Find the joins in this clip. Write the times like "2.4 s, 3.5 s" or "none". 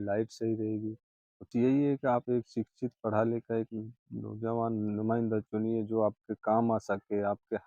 1.5 s